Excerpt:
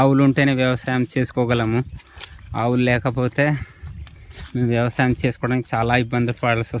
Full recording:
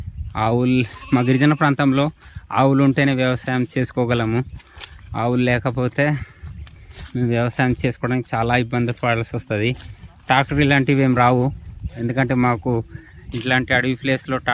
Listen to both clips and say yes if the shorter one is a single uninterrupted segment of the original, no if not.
yes